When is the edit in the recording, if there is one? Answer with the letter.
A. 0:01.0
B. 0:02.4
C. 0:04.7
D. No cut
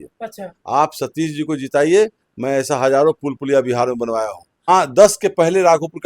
C